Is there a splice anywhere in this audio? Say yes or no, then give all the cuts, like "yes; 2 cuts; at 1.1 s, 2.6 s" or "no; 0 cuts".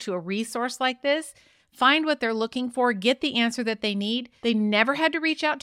yes; 1 cut; at 4.3 s